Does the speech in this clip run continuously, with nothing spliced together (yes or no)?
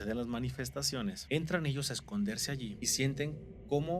no